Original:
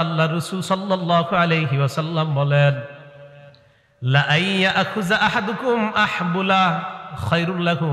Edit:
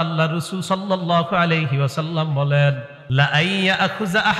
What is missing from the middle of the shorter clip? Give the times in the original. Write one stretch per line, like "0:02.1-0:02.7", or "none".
0:02.9-0:03.9